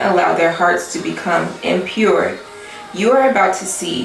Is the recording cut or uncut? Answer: uncut